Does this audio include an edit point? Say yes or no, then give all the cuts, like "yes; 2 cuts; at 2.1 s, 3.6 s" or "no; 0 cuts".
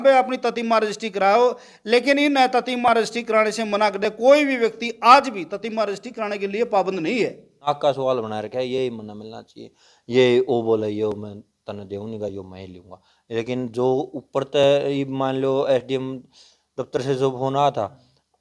yes; 1 cut; at 7.7 s